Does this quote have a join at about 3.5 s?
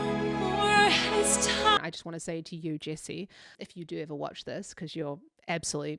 yes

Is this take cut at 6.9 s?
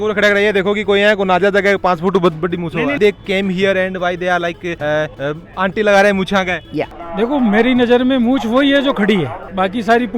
yes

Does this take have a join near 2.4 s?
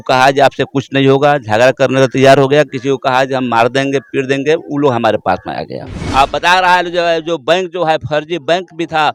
no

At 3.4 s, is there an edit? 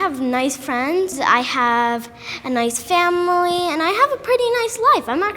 no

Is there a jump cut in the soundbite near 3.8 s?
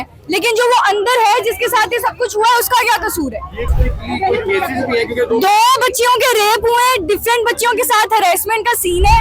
yes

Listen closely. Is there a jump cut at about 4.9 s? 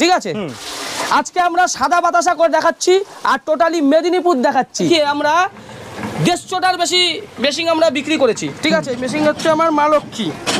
yes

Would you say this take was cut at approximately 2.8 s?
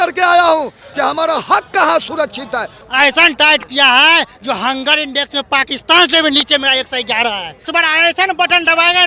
yes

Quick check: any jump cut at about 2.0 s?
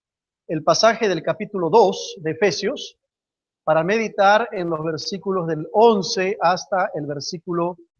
no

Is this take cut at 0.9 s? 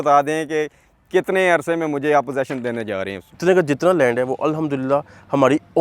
no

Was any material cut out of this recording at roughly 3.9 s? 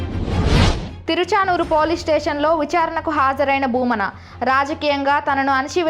no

